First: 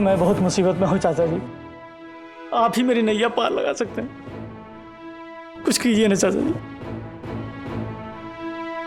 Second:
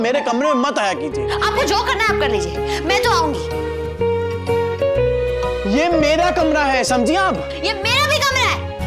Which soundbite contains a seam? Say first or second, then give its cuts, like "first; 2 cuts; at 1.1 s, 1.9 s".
second; 1 cut; at 1.1 s